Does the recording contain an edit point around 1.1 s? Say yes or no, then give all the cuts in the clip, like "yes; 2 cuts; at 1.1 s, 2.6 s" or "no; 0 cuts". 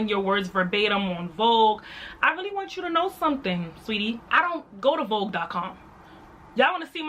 no; 1 cut; at 4.2 s